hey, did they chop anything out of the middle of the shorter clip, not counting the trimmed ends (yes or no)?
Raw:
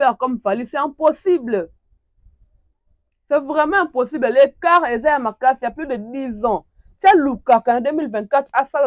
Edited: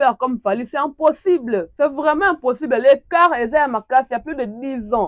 yes